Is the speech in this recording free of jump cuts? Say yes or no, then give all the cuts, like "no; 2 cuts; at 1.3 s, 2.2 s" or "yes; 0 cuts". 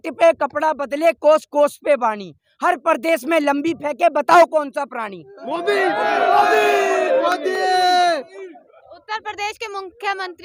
yes; 0 cuts